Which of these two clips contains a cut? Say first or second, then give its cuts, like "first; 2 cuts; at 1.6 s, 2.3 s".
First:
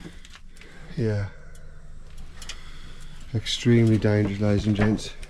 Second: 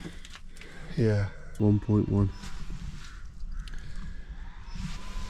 second; 1 cut; at 1.4 s